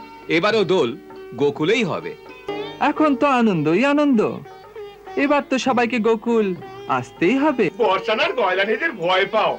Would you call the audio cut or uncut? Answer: cut